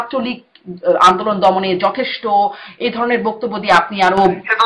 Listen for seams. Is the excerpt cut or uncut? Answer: uncut